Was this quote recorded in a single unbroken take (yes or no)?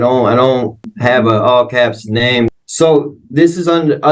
no